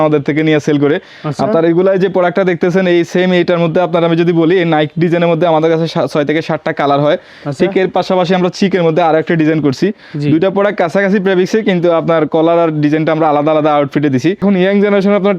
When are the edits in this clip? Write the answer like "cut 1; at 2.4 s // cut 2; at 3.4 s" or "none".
cut 1; at 14.4 s